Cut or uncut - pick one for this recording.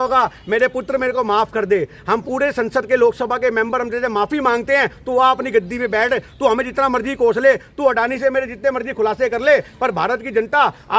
uncut